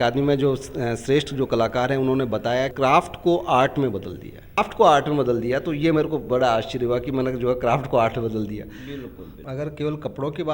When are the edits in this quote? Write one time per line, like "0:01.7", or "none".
0:02.7
0:04.6
0:09.3